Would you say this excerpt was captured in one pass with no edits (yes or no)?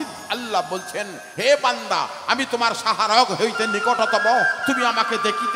yes